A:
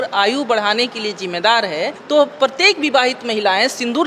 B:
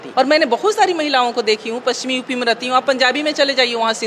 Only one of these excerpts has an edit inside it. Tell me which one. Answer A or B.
A